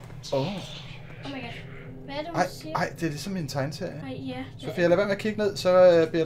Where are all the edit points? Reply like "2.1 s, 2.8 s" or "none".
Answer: none